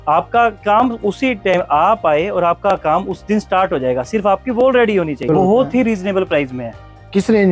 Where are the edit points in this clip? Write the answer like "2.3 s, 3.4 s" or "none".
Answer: 5.3 s